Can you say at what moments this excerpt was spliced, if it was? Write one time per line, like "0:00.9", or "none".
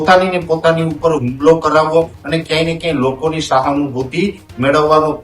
0:02.2